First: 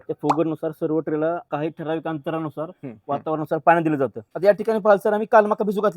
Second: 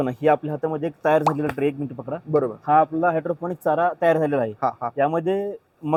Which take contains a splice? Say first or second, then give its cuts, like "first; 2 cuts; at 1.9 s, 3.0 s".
first; 2 cuts; at 1.4 s, 4.2 s